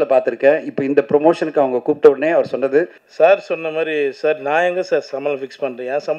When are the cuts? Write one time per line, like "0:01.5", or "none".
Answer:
0:03.0